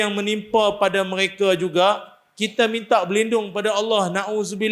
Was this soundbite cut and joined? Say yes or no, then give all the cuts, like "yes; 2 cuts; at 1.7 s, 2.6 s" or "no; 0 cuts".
no; 0 cuts